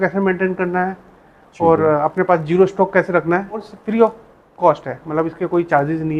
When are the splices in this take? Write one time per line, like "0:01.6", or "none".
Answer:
0:03.7